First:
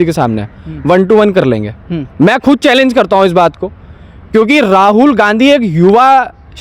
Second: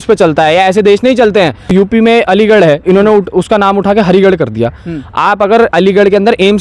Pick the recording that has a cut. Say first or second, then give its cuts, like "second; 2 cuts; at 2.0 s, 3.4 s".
second; 1 cut; at 1.7 s